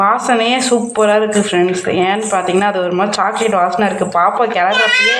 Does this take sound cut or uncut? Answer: uncut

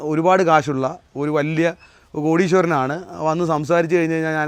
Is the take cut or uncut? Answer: uncut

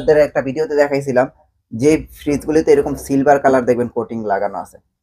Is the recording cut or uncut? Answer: uncut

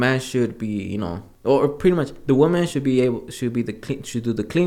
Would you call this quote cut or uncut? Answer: cut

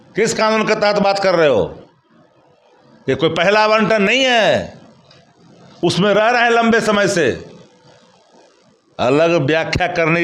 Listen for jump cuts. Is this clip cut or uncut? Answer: uncut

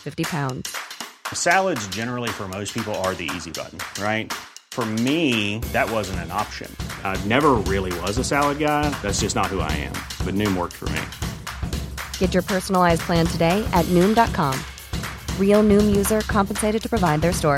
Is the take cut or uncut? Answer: uncut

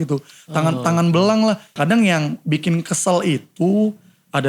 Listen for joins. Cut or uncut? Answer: cut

